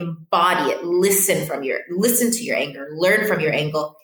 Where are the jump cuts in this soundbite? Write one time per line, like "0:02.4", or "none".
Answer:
none